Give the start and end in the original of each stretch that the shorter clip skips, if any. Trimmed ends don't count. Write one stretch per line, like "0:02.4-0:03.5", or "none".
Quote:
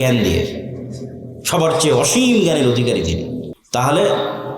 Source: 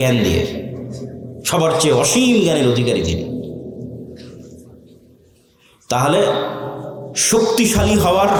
0:03.5-0:05.7